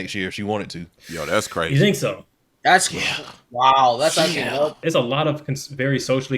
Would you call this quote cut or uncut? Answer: cut